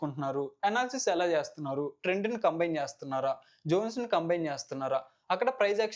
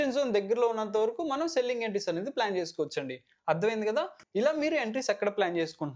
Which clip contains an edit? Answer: second; 1 cut; at 4.2 s

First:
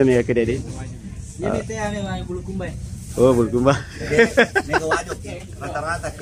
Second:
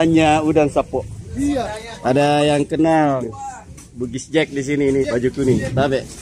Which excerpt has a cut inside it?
second; 2 cuts; at 1.8 s, 5.0 s

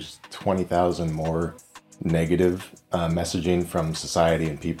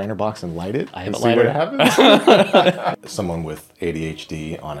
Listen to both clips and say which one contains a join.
second; 1 cut; at 2.9 s

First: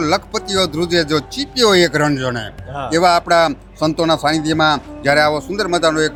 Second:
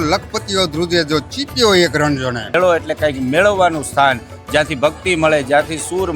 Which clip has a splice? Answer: second; 1 cut; at 2.4 s

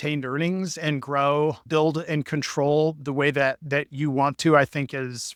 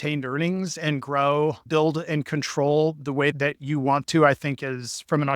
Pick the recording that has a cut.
second; 1 cut; at 3.3 s

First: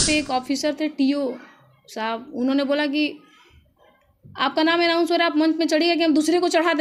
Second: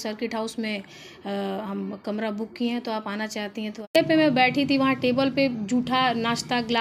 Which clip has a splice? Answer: second; 1 cut; at 4.0 s

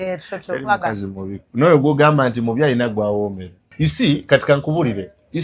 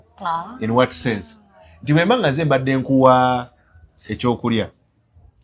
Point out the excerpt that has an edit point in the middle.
first; 1 cut; at 3.8 s

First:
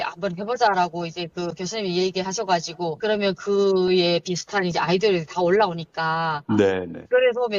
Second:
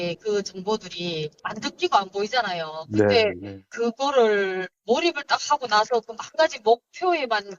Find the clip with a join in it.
second; 1 cut; at 1.4 s

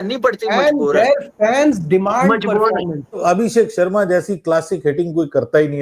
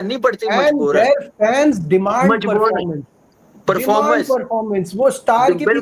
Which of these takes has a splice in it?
first; 1 cut; at 3.2 s

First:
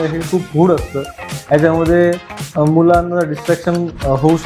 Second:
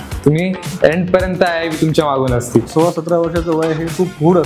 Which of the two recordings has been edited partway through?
second; 1 cut; at 2.7 s

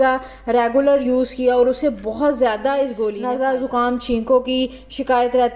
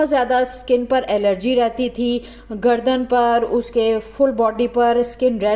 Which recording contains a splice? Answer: first; 1 cut; at 3.1 s

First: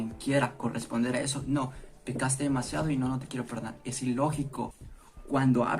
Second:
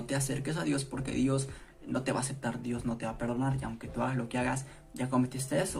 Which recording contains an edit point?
first; 1 cut; at 4.9 s

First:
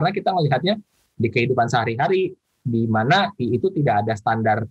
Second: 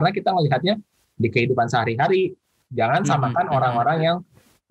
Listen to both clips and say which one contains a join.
second; 1 cut; at 2.5 s

